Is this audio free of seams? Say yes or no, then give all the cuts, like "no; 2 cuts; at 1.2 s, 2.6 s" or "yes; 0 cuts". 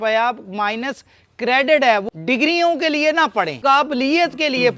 no; 2 cuts; at 2.1 s, 3.5 s